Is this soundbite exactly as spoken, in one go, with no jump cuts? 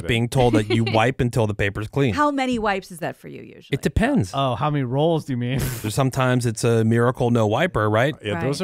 no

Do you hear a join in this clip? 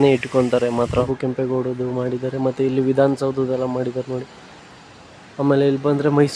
yes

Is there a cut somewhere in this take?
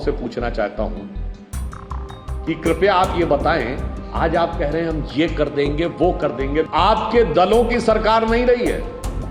yes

